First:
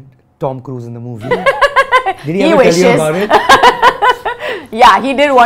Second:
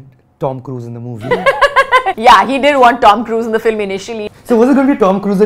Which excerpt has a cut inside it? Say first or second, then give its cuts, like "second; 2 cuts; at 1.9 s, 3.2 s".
second; 2 cuts; at 2.1 s, 4.2 s